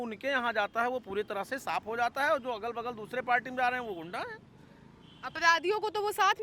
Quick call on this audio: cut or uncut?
uncut